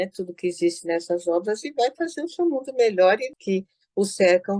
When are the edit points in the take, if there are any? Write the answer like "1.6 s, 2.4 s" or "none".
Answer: 3.3 s